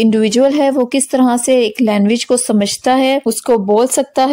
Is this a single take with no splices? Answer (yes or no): no